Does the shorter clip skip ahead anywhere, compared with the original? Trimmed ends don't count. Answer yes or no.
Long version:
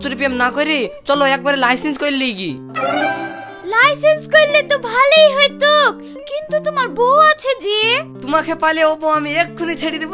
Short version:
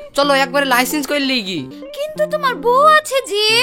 yes